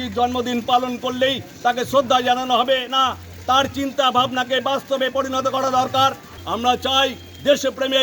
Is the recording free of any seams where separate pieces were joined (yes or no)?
no